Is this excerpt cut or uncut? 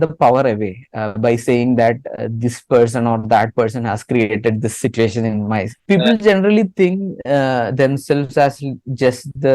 cut